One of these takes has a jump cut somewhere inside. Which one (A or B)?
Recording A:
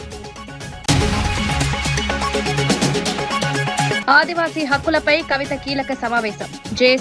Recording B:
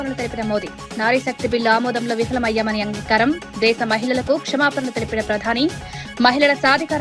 A